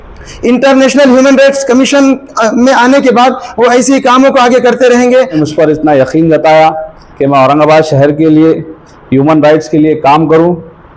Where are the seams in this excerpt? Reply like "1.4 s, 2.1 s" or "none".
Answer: 5.3 s